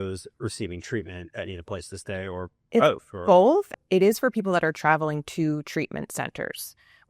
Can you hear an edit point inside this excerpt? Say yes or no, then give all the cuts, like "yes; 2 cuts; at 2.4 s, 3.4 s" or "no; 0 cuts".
yes; 1 cut; at 3.7 s